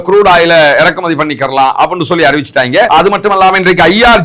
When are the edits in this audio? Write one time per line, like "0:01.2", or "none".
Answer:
0:02.9

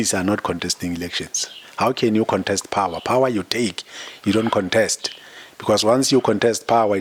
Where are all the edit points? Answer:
none

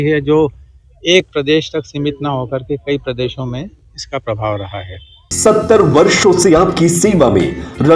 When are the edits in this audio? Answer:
0:05.3

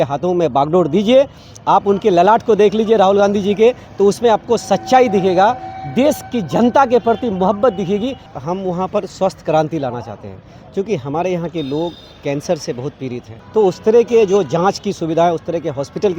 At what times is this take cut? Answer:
0:08.3
0:13.3

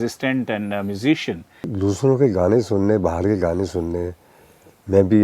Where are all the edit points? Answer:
0:01.7

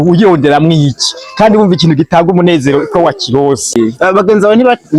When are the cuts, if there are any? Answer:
0:03.7

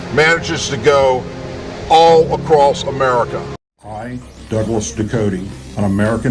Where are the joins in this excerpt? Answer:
0:03.3

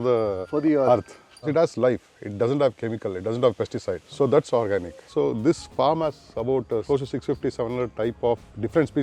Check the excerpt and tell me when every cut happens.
0:01.5
0:04.1
0:05.1

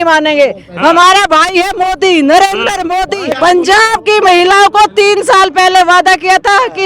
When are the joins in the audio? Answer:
0:03.3

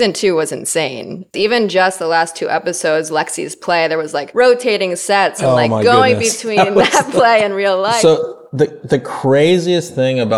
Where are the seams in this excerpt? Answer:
0:01.3
0:04.3
0:05.4
0:08.0

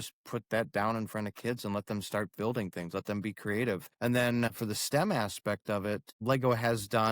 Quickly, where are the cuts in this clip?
0:06.1

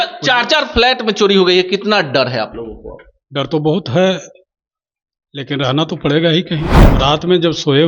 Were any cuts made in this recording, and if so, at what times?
0:06.8

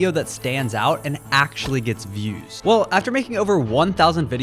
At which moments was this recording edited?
0:02.5

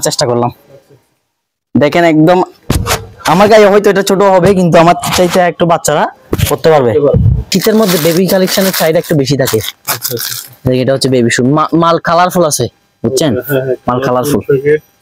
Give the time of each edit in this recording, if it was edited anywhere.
0:07.4

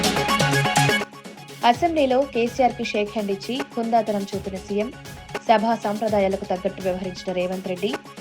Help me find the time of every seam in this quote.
0:00.9

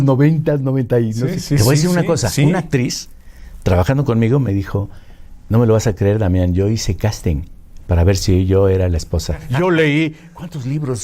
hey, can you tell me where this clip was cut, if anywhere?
0:01.3
0:09.5

